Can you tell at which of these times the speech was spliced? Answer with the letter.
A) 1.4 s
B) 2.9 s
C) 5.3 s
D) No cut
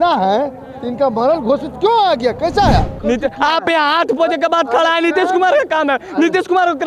B